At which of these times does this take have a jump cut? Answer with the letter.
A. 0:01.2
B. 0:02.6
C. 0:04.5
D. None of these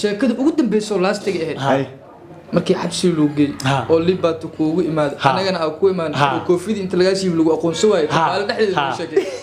D